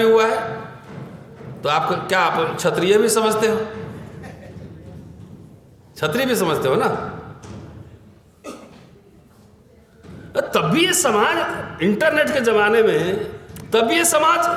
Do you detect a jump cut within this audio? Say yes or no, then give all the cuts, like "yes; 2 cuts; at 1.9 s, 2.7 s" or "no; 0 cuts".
no; 0 cuts